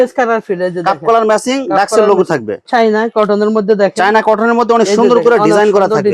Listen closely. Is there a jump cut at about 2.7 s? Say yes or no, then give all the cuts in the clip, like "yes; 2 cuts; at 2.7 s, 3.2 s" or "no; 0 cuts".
yes; 1 cut; at 2.7 s